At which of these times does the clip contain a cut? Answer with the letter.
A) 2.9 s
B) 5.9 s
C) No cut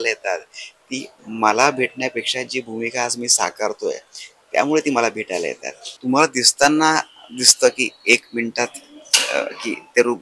B